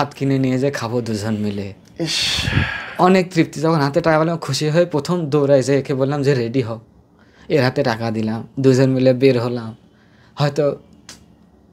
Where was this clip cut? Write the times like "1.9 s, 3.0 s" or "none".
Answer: none

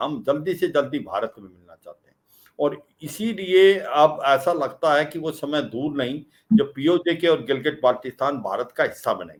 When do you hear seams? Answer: none

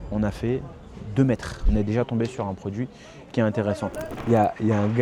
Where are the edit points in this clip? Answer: 1.6 s, 4.1 s

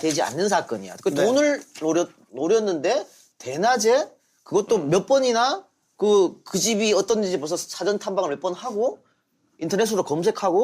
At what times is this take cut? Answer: 6.9 s

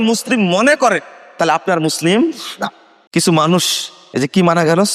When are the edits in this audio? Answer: none

